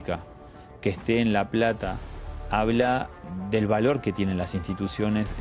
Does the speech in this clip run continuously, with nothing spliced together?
no; 1 cut; at 3.1 s

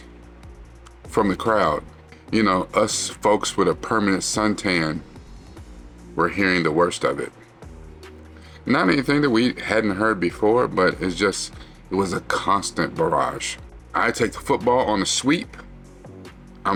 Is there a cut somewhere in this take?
no; 0 cuts

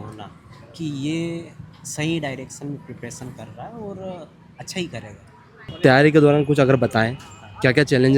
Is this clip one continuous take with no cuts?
no; 1 cut; at 5.8 s

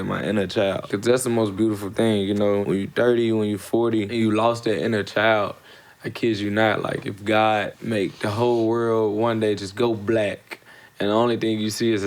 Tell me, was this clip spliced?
yes; 4 cuts; at 0.9 s, 2.6 s, 4.1 s, 7.8 s

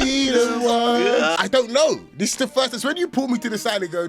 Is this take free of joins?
no; 1 cut; at 1.4 s

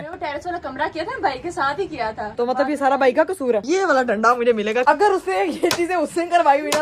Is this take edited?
yes; 3 cuts; at 2.3 s, 3.6 s, 4.8 s

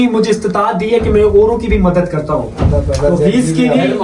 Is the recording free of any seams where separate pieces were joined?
yes; 0 cuts

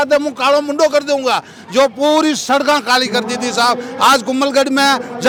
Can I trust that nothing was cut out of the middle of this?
yes; 0 cuts

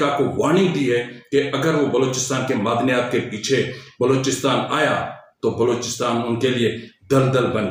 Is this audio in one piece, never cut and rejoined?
yes; 0 cuts

